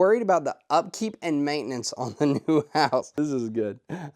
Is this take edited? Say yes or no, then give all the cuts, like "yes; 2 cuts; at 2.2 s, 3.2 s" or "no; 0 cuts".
yes; 1 cut; at 3.1 s